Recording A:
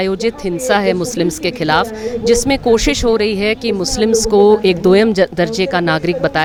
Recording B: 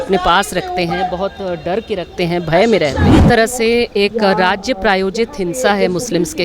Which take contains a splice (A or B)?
B